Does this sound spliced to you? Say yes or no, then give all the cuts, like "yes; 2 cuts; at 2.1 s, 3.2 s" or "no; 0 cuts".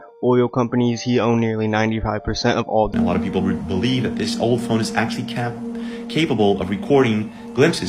yes; 1 cut; at 2.9 s